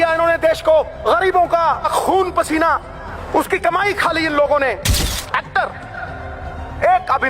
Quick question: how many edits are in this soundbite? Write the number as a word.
four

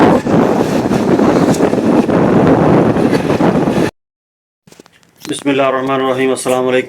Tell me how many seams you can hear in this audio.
one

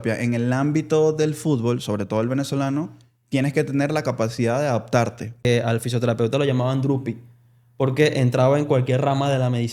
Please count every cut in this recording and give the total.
one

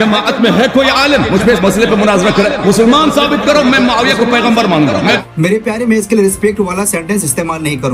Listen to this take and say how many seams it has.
one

